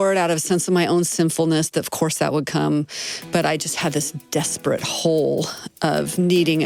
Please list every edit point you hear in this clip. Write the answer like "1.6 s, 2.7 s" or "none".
none